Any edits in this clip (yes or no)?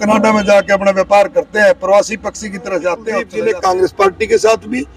yes